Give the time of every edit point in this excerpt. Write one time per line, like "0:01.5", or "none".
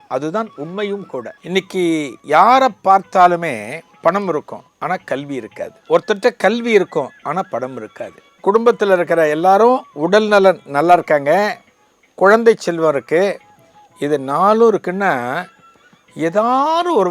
0:01.4
0:03.8
0:04.6
0:05.8
0:08.2